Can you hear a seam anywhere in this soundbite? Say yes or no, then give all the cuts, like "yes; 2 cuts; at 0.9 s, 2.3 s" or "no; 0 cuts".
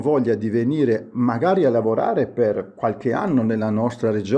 no; 0 cuts